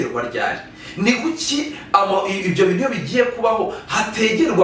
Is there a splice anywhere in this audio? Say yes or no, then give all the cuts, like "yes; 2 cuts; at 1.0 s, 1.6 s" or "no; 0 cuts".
no; 0 cuts